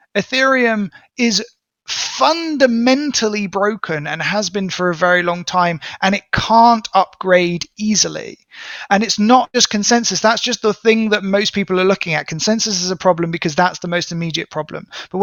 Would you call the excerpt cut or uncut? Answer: uncut